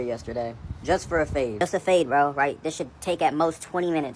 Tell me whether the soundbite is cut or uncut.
cut